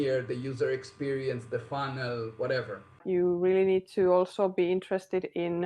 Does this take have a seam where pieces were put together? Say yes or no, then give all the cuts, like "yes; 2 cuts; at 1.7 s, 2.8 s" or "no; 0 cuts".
yes; 1 cut; at 3.0 s